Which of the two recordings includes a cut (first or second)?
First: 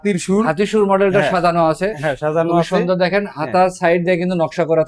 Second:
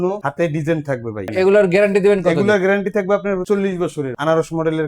second